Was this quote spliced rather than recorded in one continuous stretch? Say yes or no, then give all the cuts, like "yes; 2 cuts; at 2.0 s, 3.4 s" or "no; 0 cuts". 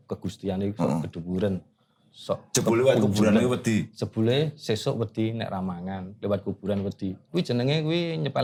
no; 0 cuts